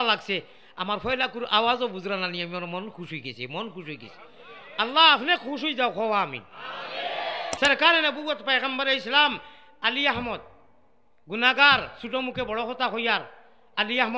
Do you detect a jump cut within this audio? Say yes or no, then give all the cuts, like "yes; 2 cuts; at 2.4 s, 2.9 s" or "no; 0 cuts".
yes; 1 cut; at 7.4 s